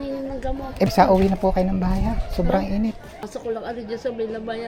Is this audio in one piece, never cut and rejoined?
no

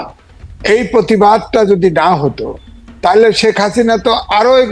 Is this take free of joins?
yes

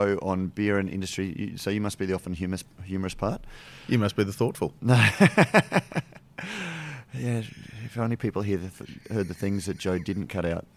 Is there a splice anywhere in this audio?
no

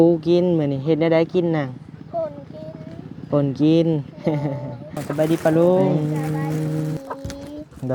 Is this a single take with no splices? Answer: no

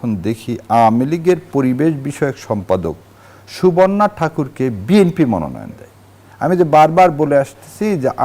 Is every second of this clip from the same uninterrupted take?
yes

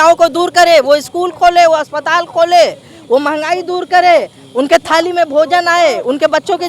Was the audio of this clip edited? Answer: no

